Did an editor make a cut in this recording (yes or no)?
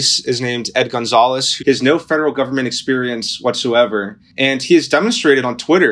yes